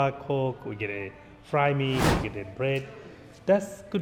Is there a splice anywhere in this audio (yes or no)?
no